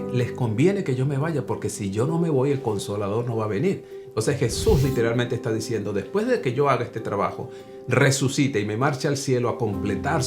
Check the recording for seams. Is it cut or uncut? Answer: cut